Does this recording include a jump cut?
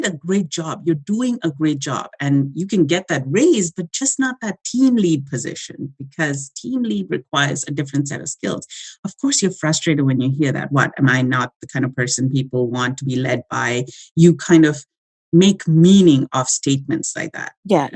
no; 0 cuts

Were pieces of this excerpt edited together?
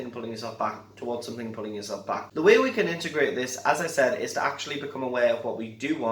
yes; 1 cut; at 2.3 s

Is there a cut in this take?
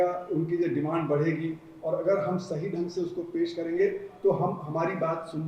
no; 0 cuts

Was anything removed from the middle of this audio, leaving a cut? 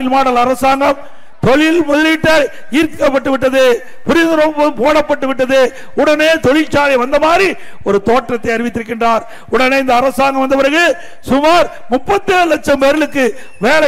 no; 0 cuts

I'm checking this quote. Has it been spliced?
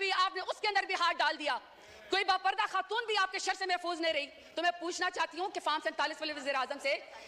no; 0 cuts

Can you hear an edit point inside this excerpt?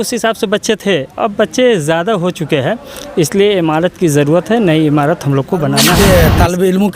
yes; 1 cut; at 5.9 s

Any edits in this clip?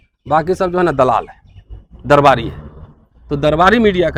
no; 0 cuts

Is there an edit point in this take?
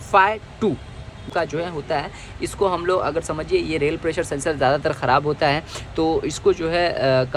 yes; 1 cut; at 1.3 s

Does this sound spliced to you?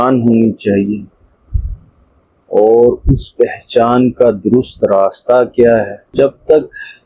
yes; 1 cut; at 6.1 s

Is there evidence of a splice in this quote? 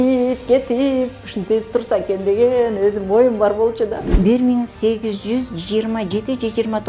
yes; 1 cut; at 4.0 s

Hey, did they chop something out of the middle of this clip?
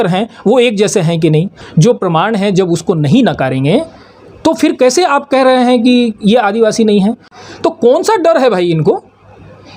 yes; 2 cuts; at 1.6 s, 7.3 s

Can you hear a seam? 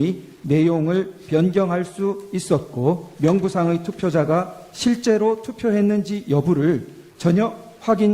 yes; 1 cut; at 3.1 s

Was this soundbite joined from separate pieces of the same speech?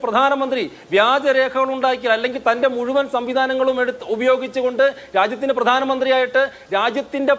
no; 0 cuts

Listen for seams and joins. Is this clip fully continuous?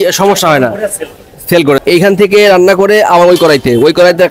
no; 1 cut; at 1.8 s

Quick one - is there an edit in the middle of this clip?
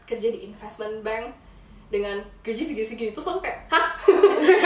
no; 0 cuts

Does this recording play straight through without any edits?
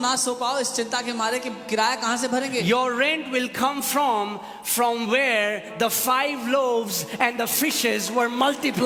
yes; 0 cuts

